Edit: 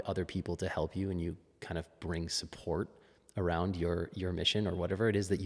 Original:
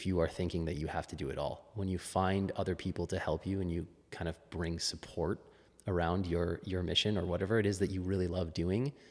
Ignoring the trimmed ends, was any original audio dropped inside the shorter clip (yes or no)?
no